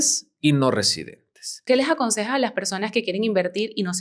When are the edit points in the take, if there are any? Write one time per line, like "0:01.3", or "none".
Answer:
0:01.6